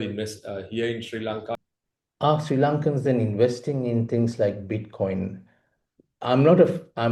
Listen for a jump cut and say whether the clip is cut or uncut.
cut